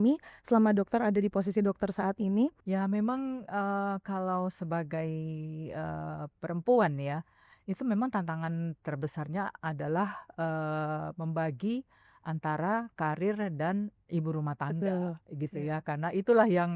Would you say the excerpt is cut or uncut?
cut